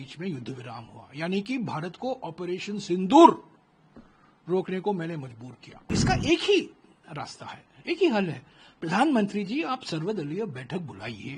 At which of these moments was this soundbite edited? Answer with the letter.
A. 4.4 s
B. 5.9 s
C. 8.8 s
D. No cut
B